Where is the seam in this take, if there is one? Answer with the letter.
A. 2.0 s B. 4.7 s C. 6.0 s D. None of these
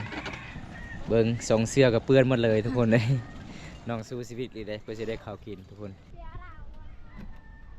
C